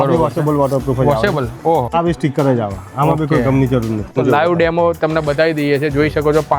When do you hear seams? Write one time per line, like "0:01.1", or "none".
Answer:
0:01.9
0:04.1